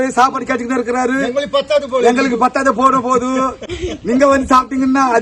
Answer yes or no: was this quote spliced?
no